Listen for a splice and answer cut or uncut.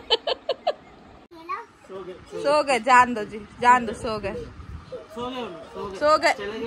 cut